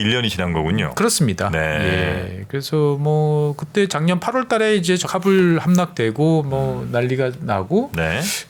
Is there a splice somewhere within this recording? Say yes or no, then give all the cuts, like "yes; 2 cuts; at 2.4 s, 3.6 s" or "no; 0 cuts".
no; 0 cuts